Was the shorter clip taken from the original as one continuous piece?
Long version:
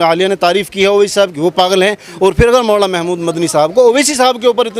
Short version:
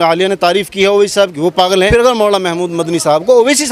no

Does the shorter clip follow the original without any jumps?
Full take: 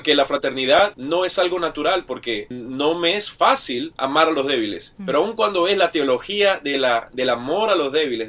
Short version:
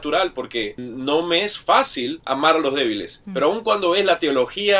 yes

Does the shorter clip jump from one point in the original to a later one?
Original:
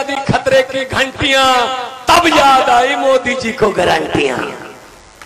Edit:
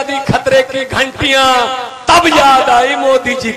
no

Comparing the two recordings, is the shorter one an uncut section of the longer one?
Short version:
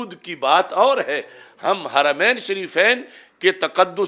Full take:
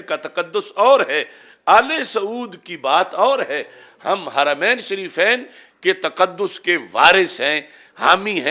yes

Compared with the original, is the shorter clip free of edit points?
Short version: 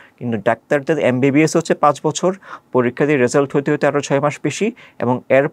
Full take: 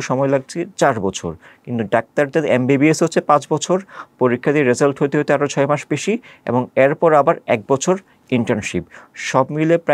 yes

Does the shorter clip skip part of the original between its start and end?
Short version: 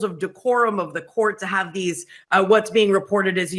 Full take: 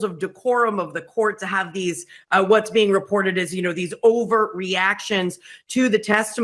no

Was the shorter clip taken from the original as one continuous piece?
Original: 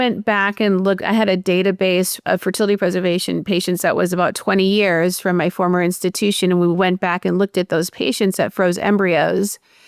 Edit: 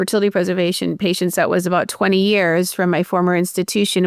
yes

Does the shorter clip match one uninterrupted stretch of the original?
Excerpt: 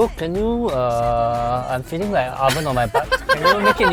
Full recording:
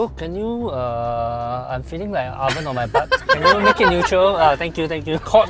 yes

